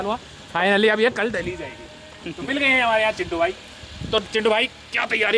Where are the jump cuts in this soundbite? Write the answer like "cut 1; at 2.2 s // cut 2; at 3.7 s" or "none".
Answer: none